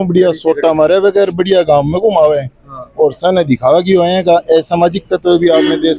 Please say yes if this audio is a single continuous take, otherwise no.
yes